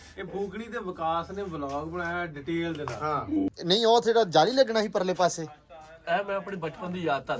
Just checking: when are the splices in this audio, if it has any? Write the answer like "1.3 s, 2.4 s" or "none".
3.5 s